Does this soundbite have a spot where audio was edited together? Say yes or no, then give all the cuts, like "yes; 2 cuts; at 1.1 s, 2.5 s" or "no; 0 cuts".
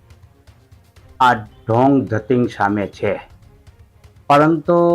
no; 0 cuts